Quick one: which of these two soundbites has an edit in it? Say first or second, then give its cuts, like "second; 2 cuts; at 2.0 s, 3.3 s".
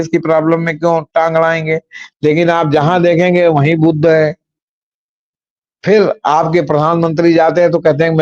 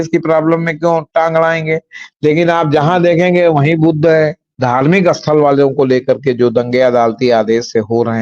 second; 1 cut; at 4.5 s